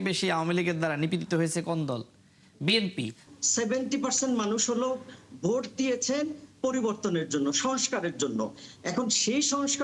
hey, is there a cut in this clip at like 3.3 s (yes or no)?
yes